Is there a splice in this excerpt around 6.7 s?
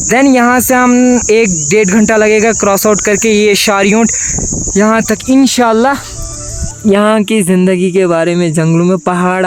yes; 1 cut; at 6.7 s

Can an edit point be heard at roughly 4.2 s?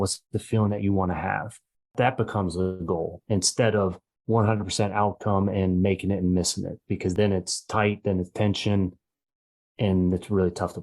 no; 2 cuts; at 1.9 s, 7.1 s

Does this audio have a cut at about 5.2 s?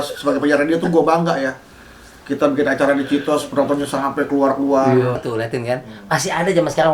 yes; 1 cut; at 5.2 s

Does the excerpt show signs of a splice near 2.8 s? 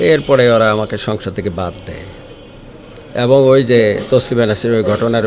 no; 0 cuts

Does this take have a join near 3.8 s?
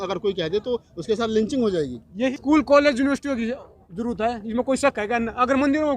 no; 1 cut; at 2.3 s

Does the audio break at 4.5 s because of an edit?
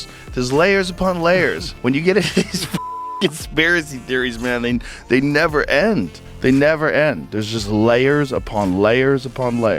no; 1 cut; at 1.7 s

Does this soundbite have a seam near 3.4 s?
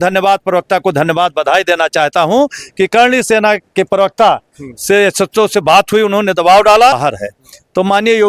no; 1 cut; at 7.0 s

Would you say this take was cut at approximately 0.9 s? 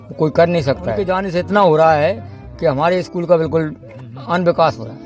yes; 1 cut; at 0.9 s

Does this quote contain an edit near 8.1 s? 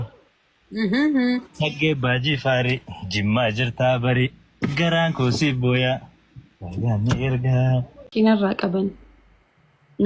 yes; 1 cut; at 8.1 s

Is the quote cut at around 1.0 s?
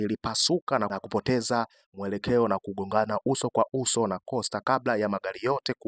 yes; 1 cut; at 1.0 s

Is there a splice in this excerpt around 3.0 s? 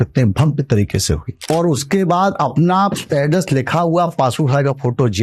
yes; 2 cuts; at 1.3 s, 3.0 s

